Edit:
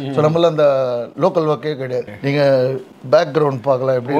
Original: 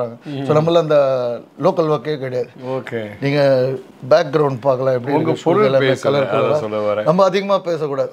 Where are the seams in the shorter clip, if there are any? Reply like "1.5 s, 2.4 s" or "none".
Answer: 1.1 s, 2.1 s